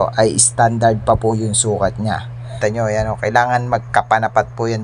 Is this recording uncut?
no; 1 cut; at 2.5 s

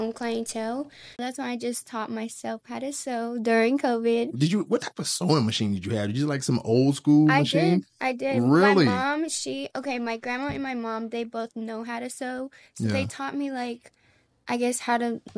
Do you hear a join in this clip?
yes; 1 cut; at 1.2 s

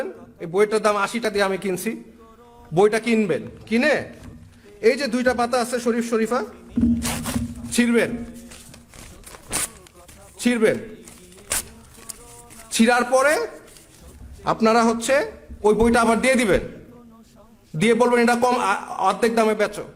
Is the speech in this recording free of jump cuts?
no; 1 cut; at 1.2 s

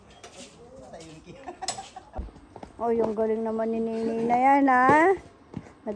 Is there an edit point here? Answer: yes; 1 cut; at 2.2 s

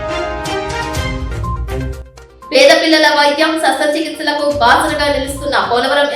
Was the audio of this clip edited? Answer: yes; 2 cuts; at 1.2 s, 1.8 s

